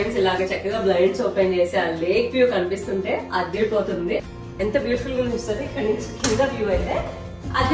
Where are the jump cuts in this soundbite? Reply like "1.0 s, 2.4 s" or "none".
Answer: 4.2 s